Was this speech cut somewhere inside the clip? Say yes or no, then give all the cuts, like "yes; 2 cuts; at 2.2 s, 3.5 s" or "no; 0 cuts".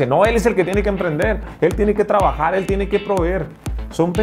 yes; 1 cut; at 1.5 s